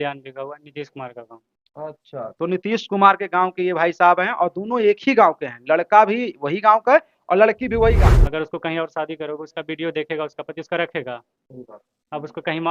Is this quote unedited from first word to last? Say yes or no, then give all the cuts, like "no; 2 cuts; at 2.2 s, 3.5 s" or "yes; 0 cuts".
no; 1 cut; at 8.1 s